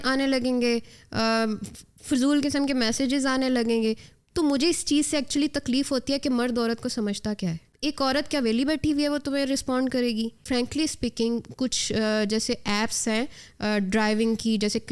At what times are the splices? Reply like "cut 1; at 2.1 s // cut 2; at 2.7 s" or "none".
cut 1; at 7.7 s // cut 2; at 10.4 s